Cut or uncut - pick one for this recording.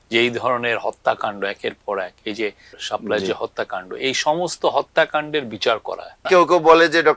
cut